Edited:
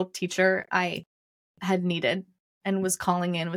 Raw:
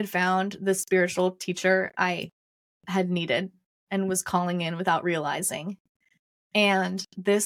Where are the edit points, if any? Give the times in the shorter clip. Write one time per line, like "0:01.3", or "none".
none